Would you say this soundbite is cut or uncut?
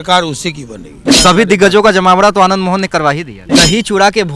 cut